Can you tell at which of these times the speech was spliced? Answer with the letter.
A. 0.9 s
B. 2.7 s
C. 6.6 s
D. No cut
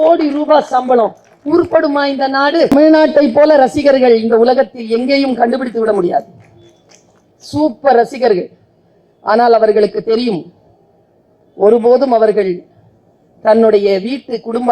B